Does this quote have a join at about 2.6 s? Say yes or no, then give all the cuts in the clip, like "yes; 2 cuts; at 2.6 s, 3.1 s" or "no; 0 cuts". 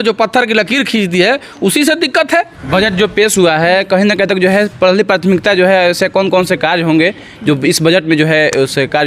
yes; 1 cut; at 2.6 s